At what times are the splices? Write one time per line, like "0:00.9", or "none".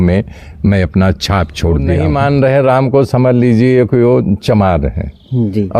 0:02.0